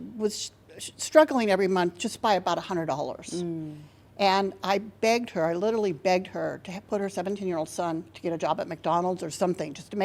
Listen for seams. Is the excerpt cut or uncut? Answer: uncut